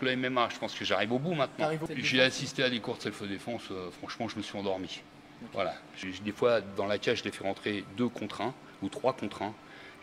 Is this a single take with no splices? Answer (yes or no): no